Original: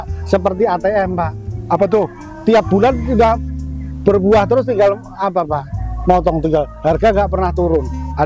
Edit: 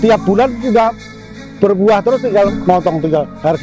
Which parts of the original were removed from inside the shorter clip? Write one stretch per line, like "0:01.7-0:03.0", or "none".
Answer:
0:05.0-0:06.0